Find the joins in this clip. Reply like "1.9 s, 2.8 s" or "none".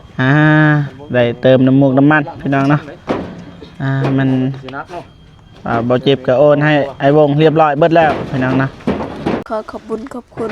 9.4 s